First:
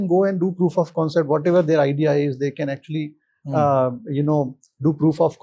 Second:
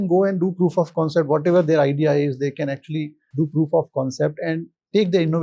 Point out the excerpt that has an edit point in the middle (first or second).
second